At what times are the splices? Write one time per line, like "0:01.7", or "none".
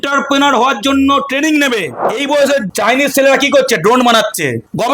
0:02.0